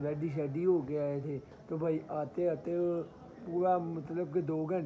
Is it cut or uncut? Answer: uncut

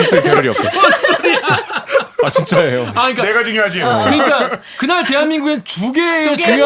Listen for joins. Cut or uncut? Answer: uncut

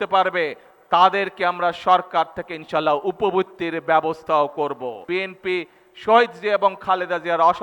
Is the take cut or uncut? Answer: cut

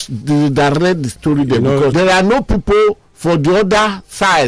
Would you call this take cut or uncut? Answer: cut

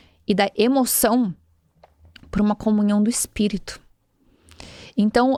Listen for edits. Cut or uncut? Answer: uncut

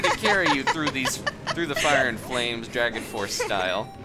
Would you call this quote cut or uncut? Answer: uncut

